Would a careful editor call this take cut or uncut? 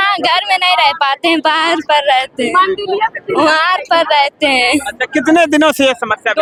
uncut